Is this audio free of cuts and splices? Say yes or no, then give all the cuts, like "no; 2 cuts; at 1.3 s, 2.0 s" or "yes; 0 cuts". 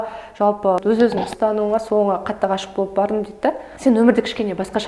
no; 2 cuts; at 0.8 s, 3.7 s